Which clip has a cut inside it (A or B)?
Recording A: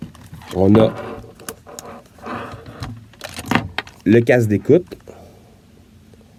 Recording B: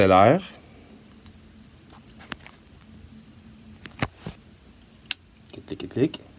B